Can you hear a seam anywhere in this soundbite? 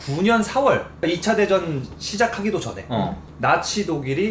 yes; 1 cut; at 1.0 s

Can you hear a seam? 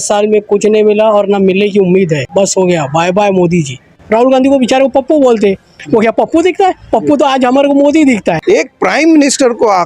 yes; 3 cuts; at 2.2 s, 3.9 s, 8.4 s

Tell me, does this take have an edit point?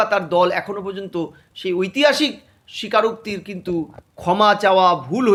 no; 0 cuts

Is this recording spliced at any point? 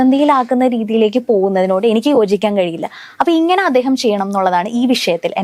no; 0 cuts

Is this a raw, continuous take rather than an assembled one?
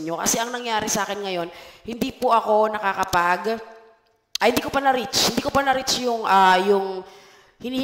yes; 0 cuts

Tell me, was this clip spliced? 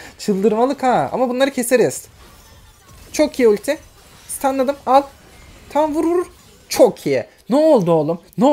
no; 0 cuts

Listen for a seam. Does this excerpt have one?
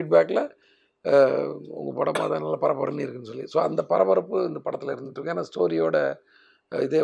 no; 0 cuts

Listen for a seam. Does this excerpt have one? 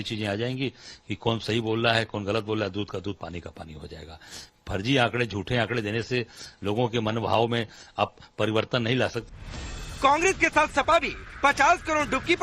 yes; 1 cut; at 8.2 s

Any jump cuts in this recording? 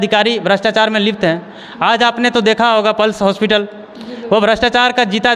no; 0 cuts

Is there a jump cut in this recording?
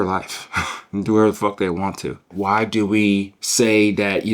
yes; 2 cuts; at 2.3 s, 3.4 s

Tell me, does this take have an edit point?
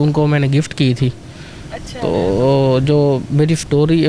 no; 0 cuts

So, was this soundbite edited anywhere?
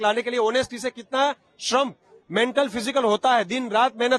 no; 0 cuts

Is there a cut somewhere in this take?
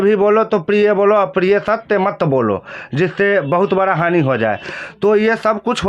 no; 0 cuts

